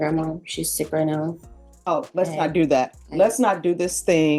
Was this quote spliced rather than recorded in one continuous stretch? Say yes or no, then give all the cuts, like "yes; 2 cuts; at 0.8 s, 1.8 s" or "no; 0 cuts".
no; 0 cuts